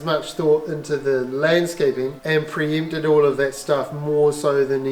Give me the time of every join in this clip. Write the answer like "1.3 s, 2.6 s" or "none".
2.2 s